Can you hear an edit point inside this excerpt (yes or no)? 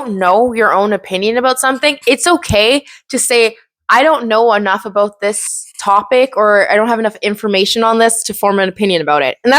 no